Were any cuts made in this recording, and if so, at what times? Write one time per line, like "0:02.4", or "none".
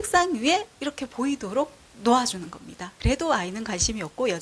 0:02.9